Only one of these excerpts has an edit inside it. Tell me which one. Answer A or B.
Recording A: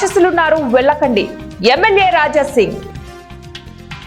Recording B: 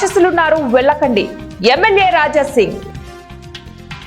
A